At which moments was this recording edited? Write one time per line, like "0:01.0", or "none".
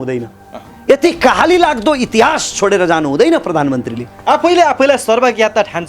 none